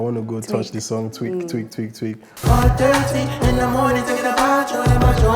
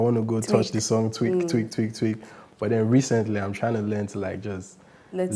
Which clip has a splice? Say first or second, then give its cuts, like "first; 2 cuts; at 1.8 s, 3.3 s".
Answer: first; 1 cut; at 2.4 s